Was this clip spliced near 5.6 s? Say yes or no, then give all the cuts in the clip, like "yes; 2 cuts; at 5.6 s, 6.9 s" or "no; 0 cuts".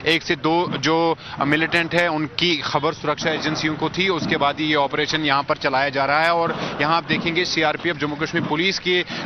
yes; 1 cut; at 5.6 s